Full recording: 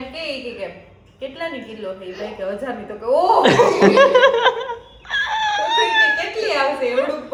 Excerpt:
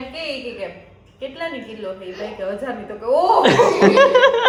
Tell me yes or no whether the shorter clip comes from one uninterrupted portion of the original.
yes